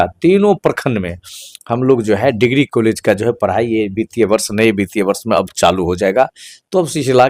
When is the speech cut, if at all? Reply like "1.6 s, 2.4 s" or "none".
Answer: none